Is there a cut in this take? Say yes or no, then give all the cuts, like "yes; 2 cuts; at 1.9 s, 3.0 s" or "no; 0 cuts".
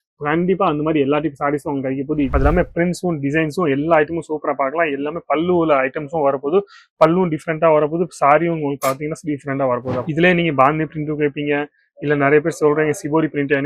yes; 2 cuts; at 2.3 s, 10.0 s